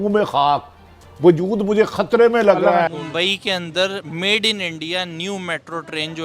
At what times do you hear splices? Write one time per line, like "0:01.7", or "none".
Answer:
0:02.9